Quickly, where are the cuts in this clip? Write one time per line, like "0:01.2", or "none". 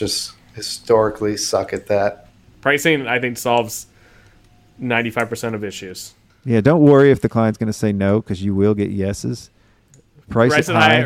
0:02.3